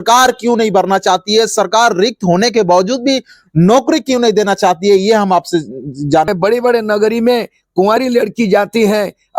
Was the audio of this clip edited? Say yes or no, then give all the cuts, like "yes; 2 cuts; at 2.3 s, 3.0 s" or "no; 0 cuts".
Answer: yes; 1 cut; at 6.3 s